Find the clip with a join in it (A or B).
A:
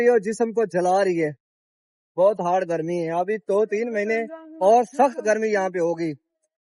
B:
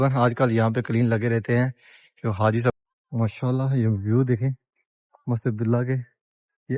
B